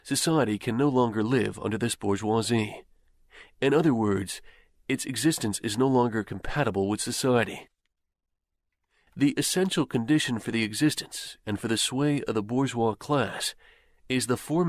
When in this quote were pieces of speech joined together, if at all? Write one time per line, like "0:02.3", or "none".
0:01.5